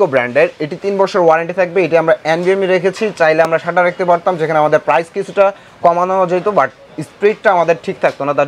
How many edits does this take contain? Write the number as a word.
zero